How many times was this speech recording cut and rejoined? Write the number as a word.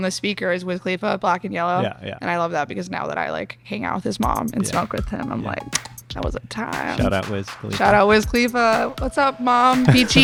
zero